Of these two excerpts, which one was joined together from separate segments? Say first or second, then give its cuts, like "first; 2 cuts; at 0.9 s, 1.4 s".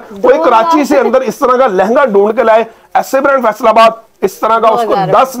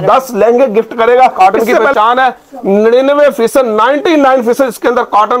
second; 1 cut; at 1.3 s